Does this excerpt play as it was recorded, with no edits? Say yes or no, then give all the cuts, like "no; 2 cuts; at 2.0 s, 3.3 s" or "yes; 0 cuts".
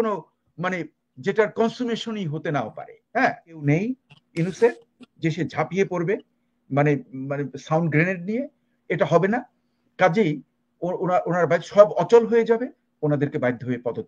no; 1 cut; at 3.6 s